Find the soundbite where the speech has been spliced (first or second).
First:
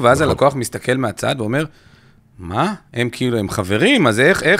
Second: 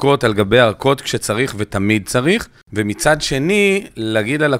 second